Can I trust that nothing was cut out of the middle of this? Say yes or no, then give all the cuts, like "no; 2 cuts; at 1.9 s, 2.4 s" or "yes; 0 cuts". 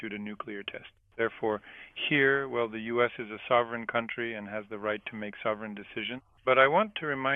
no; 2 cuts; at 1.0 s, 6.3 s